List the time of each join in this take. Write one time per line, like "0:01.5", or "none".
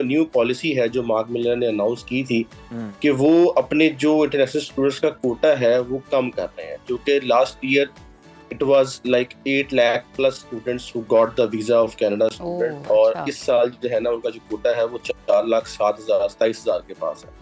none